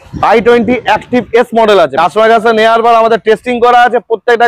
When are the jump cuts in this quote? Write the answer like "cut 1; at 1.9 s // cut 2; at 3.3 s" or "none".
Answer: cut 1; at 1.9 s